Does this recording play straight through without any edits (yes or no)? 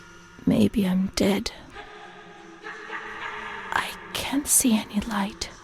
yes